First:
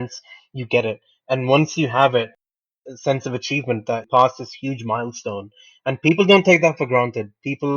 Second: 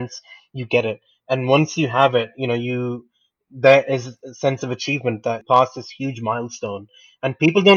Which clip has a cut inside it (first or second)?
first